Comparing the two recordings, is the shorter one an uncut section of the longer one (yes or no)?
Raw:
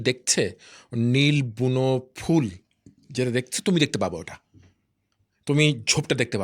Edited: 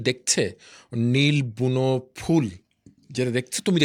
yes